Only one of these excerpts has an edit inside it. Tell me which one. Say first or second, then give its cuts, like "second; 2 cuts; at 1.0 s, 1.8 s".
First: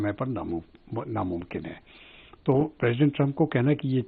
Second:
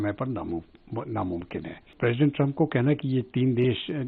second; 1 cut; at 1.9 s